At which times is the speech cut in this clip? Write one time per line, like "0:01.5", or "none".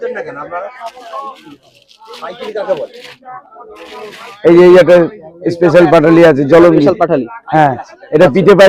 none

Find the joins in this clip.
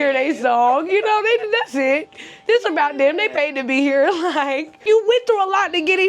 0:04.8

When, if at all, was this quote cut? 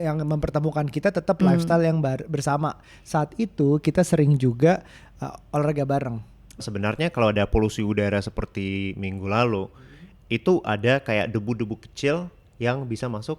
0:06.6

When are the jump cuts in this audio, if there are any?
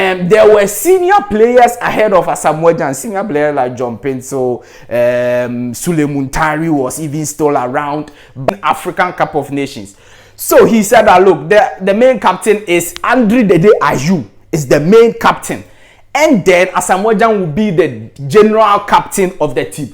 0:08.5

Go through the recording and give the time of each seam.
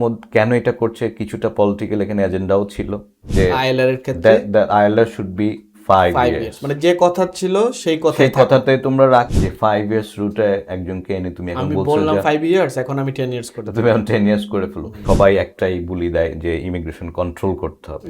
0:03.2
0:09.3
0:14.9

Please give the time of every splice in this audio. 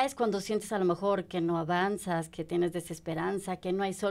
none

